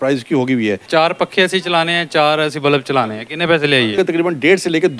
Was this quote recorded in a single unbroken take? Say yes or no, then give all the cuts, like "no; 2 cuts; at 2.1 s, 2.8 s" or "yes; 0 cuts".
no; 2 cuts; at 0.8 s, 4.0 s